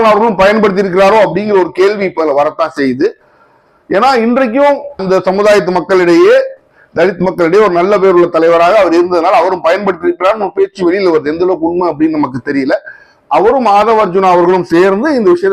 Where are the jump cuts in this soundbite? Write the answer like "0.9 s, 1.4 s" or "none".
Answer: none